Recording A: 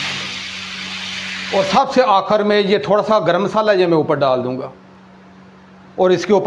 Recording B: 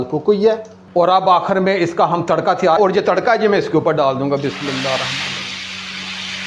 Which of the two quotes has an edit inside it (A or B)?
B